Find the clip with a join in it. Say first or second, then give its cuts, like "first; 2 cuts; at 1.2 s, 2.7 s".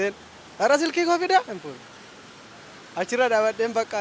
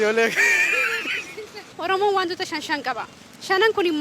second; 1 cut; at 1.7 s